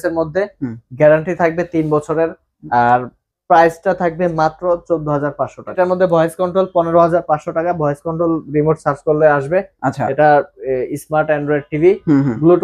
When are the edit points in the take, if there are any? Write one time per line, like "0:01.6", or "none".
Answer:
0:05.8